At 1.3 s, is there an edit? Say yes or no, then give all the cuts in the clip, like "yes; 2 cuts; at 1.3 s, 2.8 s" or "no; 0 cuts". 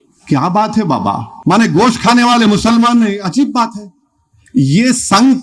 yes; 1 cut; at 1.3 s